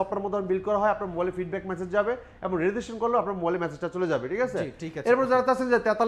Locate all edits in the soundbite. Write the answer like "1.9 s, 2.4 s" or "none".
none